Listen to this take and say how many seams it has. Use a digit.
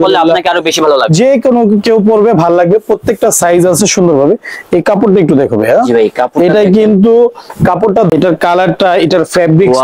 1